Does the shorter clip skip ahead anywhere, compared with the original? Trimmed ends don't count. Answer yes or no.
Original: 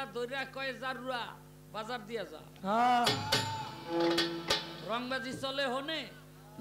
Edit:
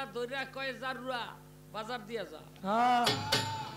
no